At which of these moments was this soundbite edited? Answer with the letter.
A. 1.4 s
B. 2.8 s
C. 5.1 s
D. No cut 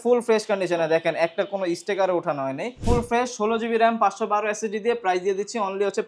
B